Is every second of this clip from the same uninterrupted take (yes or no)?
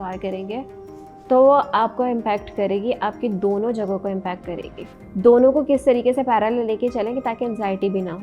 no